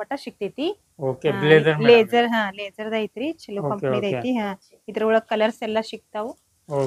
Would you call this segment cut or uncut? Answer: uncut